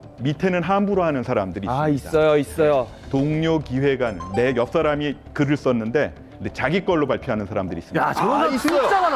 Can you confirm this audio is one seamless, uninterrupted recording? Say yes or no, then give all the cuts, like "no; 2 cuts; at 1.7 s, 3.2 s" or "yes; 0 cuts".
no; 1 cut; at 3.0 s